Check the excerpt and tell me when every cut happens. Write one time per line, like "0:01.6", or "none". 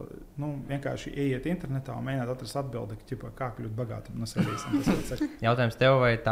0:05.4

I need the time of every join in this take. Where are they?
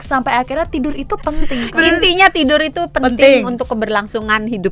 0:01.6

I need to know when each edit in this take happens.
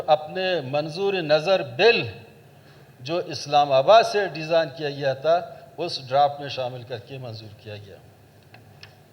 none

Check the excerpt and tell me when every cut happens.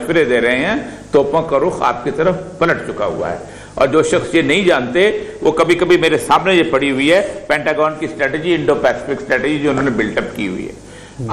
none

